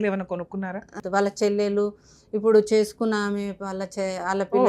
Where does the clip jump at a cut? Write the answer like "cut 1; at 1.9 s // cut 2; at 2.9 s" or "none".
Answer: cut 1; at 1.0 s